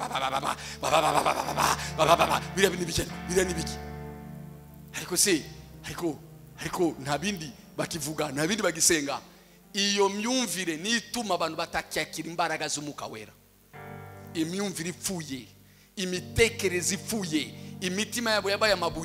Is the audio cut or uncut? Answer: uncut